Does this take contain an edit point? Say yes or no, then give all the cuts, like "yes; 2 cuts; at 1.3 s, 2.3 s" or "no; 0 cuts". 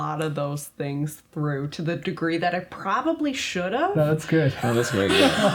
no; 0 cuts